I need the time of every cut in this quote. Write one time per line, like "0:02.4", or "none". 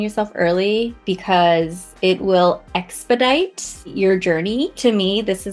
0:01.0
0:01.8
0:03.9
0:04.7